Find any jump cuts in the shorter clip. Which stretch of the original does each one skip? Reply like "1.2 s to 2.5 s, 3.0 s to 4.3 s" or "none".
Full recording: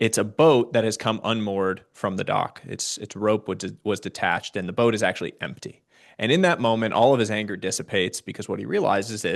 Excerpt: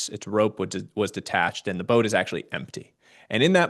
none